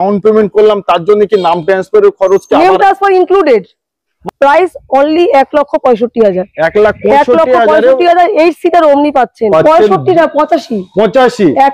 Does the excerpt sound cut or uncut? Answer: cut